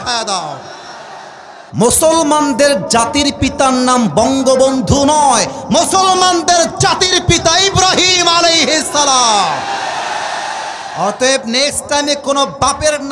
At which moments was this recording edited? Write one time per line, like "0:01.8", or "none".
0:01.7